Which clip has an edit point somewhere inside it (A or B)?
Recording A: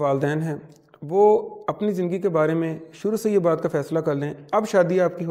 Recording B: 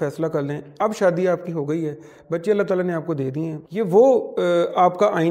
B